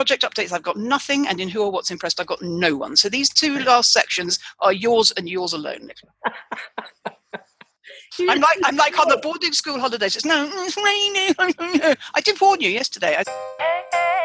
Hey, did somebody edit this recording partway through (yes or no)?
yes